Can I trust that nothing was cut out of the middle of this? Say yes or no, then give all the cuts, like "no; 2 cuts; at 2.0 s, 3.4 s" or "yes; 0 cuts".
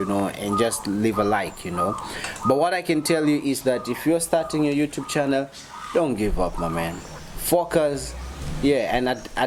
yes; 0 cuts